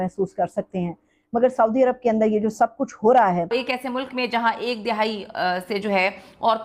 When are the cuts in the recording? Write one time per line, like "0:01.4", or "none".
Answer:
0:03.5